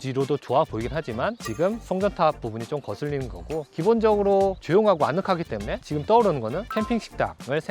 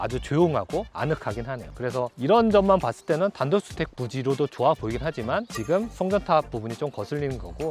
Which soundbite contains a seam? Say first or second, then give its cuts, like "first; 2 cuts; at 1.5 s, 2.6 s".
first; 1 cut; at 6.7 s